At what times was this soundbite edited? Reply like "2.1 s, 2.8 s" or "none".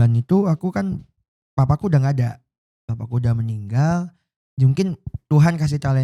none